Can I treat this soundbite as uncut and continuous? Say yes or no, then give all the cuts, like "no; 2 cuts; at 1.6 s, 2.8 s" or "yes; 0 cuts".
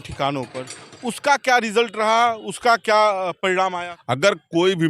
no; 1 cut; at 3.9 s